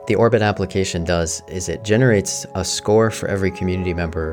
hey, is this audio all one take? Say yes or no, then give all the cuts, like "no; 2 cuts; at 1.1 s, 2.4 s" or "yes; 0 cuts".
yes; 0 cuts